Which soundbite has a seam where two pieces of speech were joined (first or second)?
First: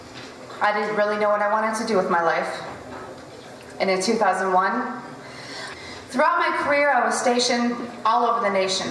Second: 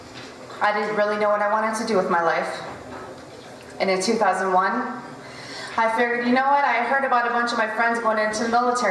second